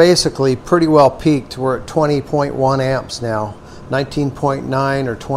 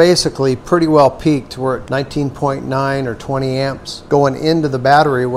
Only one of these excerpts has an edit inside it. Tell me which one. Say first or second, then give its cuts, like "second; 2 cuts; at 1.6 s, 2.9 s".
second; 2 cuts; at 1.8 s, 3.9 s